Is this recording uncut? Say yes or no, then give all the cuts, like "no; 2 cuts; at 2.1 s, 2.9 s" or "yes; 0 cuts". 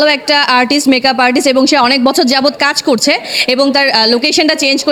yes; 0 cuts